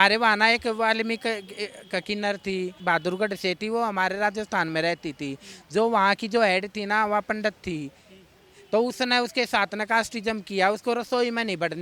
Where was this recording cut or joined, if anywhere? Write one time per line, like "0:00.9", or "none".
0:02.8